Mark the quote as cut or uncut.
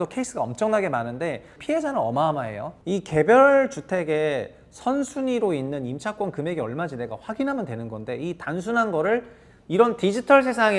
cut